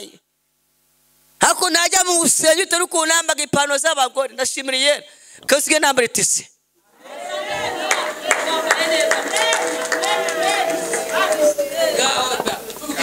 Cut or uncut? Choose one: uncut